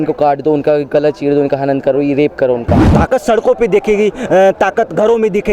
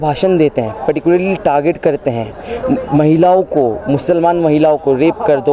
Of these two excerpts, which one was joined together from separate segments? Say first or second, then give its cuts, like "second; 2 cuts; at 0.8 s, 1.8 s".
first; 1 cut; at 2.8 s